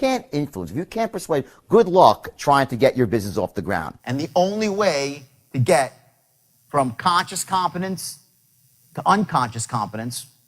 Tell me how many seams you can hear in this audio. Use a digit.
1